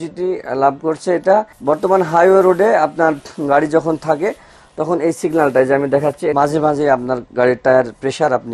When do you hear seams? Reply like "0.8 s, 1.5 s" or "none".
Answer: 1.5 s, 6.3 s